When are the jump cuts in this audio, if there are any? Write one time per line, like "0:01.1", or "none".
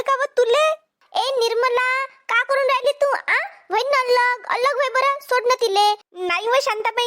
0:01.0
0:06.1